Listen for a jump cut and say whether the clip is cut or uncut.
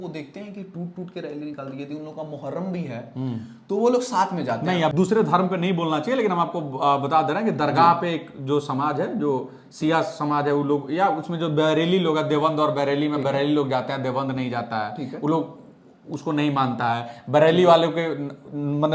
cut